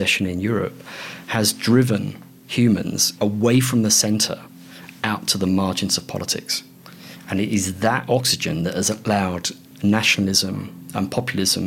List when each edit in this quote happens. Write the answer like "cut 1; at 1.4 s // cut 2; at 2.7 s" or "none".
none